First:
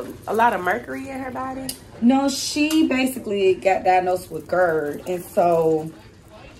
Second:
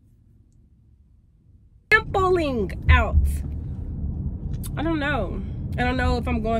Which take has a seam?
second; 1 cut; at 1.9 s

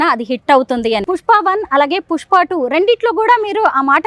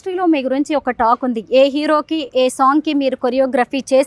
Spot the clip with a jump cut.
first; 1 cut; at 1.0 s

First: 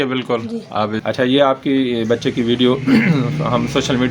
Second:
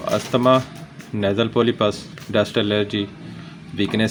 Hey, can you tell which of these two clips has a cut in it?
first; 1 cut; at 1.0 s

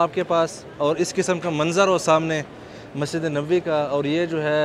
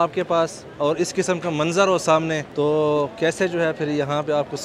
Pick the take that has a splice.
second; 1 cut; at 2.5 s

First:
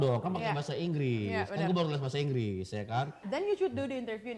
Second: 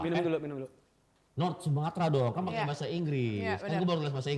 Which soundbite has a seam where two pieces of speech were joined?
first; 1 cut; at 3.2 s

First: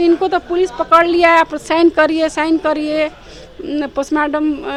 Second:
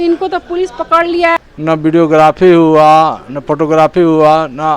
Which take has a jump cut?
second; 1 cut; at 1.4 s

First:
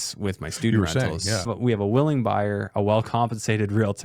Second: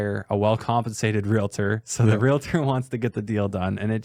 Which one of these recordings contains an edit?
first; 1 cut; at 1.5 s

